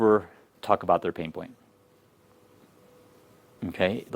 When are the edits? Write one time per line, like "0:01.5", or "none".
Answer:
none

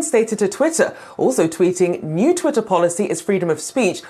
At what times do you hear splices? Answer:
0:01.0

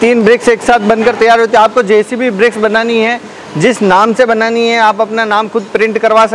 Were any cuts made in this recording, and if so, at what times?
none

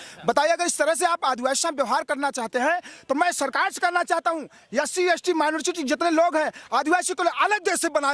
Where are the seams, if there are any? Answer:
none

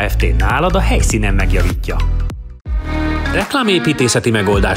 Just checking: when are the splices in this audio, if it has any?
0:02.5

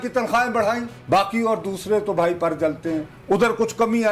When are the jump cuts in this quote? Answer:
0:03.1

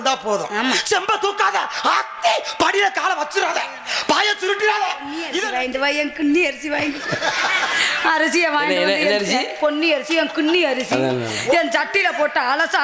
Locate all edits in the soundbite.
0:05.4

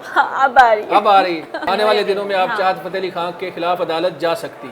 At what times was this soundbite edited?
0:01.6

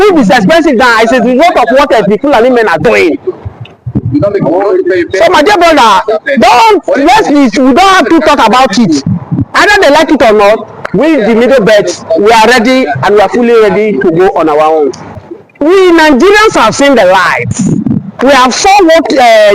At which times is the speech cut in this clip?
0:15.1

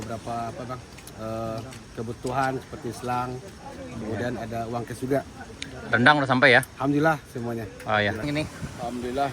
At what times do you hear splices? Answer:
0:08.2

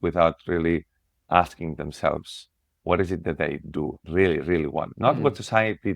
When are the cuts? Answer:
0:04.9

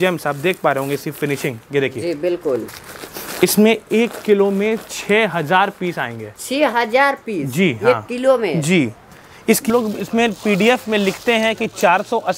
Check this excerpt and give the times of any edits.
0:09.7

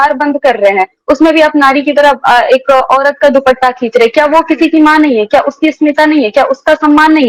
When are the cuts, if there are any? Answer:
none

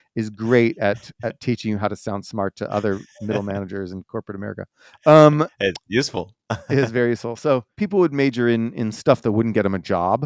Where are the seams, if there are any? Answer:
0:07.8

